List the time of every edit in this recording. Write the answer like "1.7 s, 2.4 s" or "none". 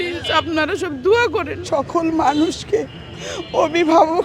1.6 s